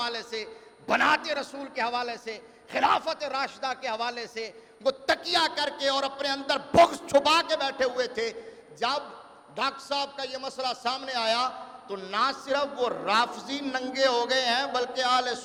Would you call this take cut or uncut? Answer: uncut